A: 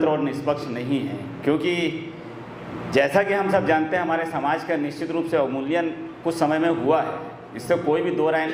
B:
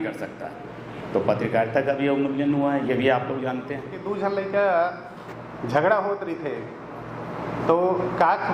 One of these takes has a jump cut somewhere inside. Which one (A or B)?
B